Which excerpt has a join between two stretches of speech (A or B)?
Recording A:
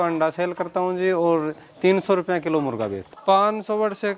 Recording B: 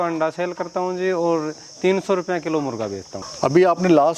A